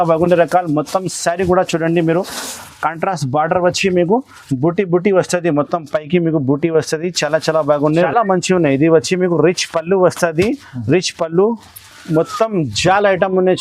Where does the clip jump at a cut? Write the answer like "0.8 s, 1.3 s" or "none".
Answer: 7.9 s